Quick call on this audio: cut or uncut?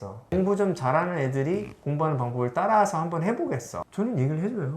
cut